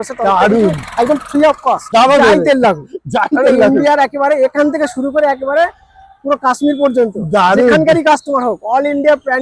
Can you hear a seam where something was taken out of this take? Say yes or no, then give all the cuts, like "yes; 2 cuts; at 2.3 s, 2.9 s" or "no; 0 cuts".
yes; 1 cut; at 1.9 s